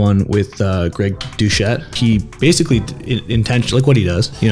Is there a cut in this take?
yes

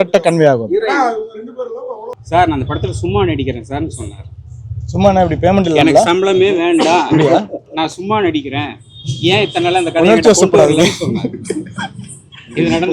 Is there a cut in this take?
yes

